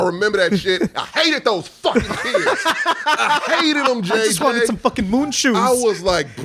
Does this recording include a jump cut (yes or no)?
no